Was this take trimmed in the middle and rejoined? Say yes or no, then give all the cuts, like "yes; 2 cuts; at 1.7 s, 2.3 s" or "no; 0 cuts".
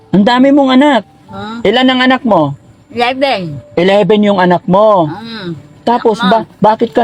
no; 0 cuts